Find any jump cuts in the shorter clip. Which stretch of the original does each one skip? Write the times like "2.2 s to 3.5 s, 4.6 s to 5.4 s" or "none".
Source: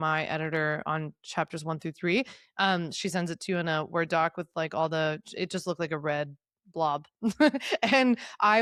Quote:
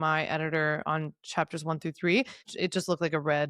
2.5 s to 5.2 s